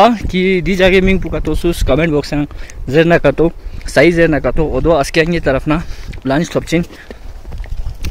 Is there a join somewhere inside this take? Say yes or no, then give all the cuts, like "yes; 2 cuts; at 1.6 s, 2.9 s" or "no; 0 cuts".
no; 0 cuts